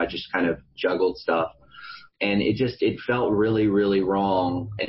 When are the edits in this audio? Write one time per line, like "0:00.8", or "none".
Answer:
none

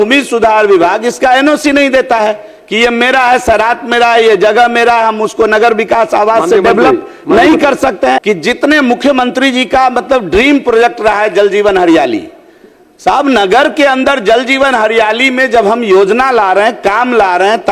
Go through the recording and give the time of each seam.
0:08.2

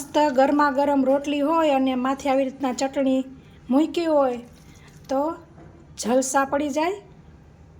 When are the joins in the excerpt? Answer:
none

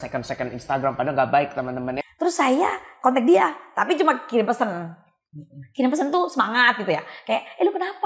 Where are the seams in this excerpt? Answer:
0:02.0

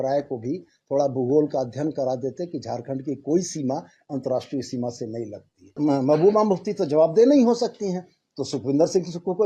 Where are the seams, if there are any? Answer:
0:05.8

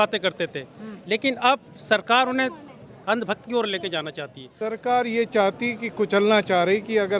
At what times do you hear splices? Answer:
0:04.4

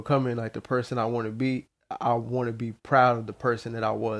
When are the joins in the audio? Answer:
none

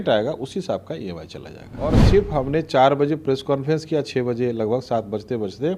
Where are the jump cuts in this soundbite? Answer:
0:02.0

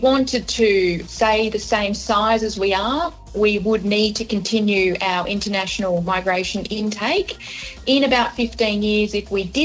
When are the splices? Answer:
0:01.1

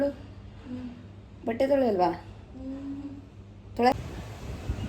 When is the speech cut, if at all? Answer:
0:03.9

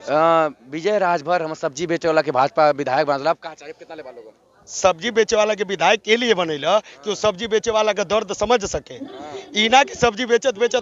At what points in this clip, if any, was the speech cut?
none

